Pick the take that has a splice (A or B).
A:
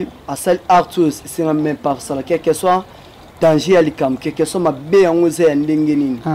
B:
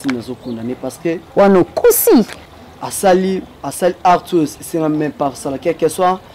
B